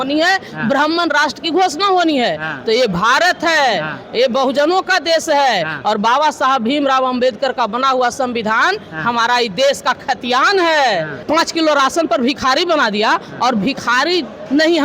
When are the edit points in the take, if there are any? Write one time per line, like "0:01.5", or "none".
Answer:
0:11.1